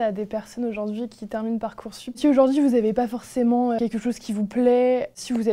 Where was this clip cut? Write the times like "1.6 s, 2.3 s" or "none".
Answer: 2.2 s, 3.8 s